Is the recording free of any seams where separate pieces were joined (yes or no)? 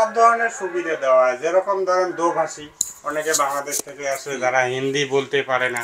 yes